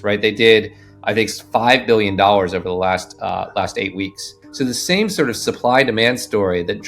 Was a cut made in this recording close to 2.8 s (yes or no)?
no